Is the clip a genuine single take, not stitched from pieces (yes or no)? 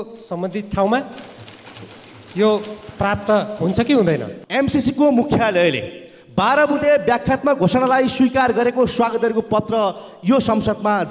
no